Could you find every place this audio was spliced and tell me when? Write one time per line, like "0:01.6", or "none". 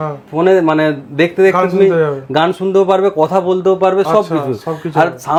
none